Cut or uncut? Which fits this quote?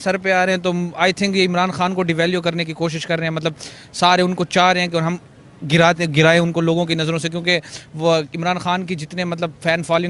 uncut